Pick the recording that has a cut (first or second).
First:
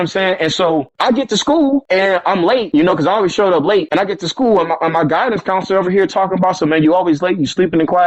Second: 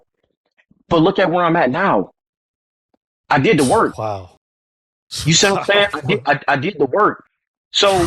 first